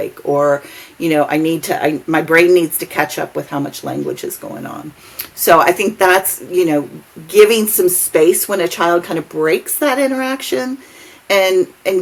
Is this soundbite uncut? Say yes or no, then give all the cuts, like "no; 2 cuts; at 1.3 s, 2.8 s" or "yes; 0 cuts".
yes; 0 cuts